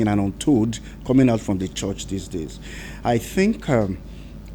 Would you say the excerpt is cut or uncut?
uncut